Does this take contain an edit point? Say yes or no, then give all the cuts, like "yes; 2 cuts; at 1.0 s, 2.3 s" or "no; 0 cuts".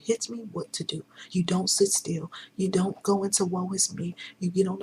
no; 0 cuts